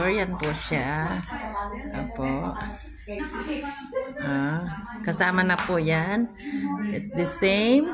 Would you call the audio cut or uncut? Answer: uncut